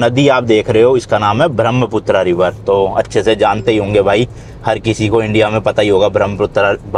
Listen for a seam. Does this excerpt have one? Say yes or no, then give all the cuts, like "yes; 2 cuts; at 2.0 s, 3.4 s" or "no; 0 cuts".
no; 0 cuts